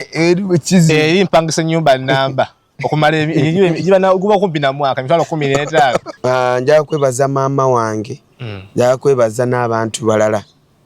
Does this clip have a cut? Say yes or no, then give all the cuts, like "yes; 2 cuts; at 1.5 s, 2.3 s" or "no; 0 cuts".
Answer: yes; 1 cut; at 6.1 s